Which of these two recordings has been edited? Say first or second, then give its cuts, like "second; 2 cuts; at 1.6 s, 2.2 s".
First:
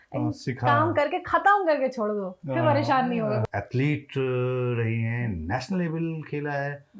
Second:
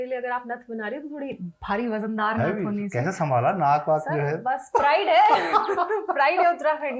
first; 1 cut; at 3.5 s